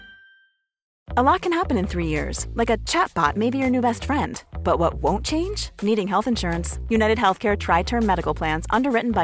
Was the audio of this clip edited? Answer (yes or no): yes